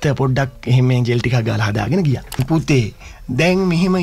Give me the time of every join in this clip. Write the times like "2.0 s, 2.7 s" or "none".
2.4 s